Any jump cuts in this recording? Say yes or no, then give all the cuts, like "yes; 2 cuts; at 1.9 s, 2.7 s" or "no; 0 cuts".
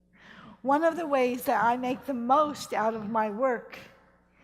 no; 0 cuts